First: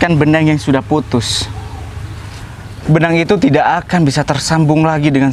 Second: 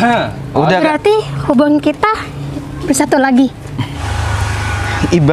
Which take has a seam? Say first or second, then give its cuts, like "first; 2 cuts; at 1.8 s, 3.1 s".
second; 1 cut; at 4.0 s